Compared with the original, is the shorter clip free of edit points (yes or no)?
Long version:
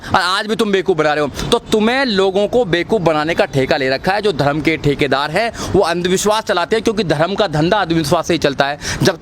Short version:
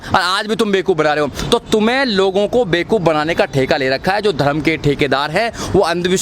yes